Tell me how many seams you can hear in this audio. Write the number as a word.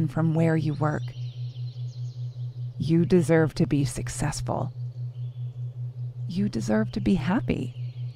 two